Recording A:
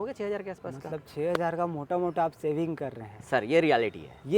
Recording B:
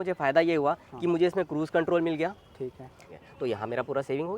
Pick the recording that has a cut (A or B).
B